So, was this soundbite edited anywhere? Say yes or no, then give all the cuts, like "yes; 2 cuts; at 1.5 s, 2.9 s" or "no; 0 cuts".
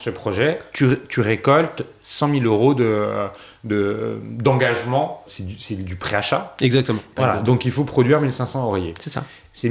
yes; 2 cuts; at 5.2 s, 7.1 s